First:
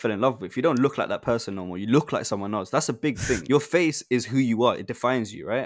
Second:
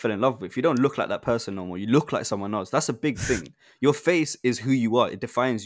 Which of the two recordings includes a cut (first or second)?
first